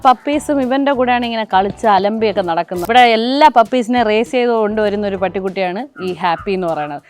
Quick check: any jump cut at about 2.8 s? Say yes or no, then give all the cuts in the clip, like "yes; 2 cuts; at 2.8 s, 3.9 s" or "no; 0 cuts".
yes; 1 cut; at 2.8 s